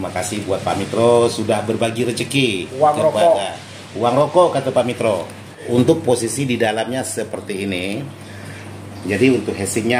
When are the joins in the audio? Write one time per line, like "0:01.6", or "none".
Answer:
0:05.7